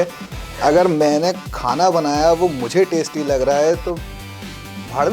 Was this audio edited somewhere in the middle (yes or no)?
no